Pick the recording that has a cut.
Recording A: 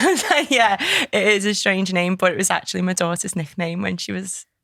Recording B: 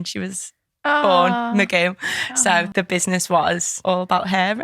B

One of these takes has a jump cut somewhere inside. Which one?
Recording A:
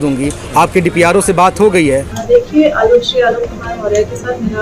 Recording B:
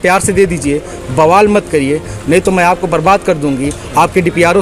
A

